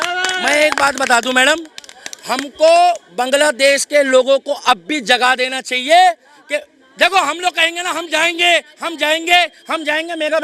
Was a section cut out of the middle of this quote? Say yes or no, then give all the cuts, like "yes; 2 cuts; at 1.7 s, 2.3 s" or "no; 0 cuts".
no; 0 cuts